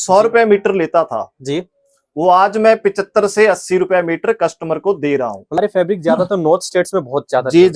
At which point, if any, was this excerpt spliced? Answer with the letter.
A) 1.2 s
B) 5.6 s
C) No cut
B